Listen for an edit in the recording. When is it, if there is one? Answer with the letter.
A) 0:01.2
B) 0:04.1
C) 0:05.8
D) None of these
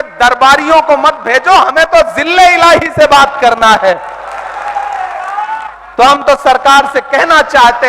C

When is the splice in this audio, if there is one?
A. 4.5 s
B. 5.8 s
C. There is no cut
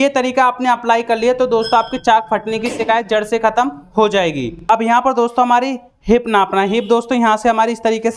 A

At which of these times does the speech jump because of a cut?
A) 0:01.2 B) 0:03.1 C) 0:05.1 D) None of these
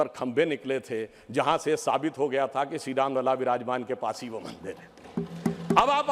D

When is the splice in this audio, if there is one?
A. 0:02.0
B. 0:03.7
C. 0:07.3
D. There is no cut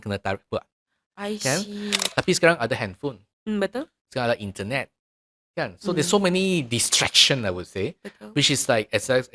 A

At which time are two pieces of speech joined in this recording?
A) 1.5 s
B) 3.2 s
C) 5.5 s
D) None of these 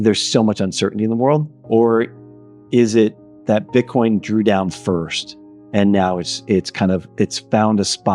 A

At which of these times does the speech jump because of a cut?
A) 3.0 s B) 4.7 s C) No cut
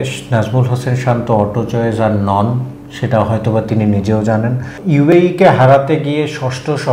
B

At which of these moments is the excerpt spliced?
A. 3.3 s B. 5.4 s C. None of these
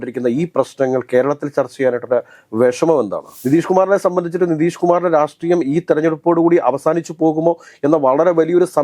A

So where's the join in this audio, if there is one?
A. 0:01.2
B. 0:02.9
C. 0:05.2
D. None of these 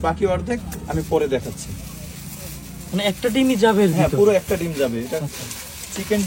D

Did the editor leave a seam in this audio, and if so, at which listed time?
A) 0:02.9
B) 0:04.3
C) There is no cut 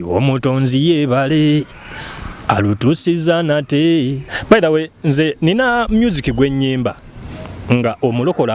B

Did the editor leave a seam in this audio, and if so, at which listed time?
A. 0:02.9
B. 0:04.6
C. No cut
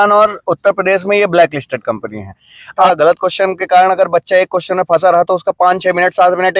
A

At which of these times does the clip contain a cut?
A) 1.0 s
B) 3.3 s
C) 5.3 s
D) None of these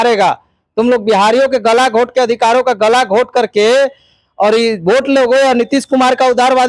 D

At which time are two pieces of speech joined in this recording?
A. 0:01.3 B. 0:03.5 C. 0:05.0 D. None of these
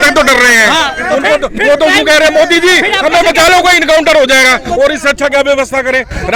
D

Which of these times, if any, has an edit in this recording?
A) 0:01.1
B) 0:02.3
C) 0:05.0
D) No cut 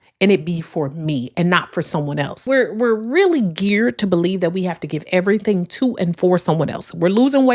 B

